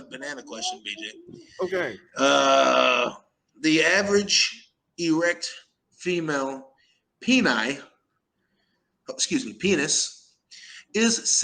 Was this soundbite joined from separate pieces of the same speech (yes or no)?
no